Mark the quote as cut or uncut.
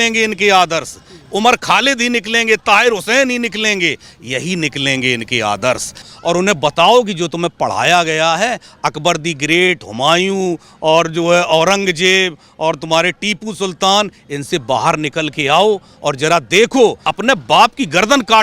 cut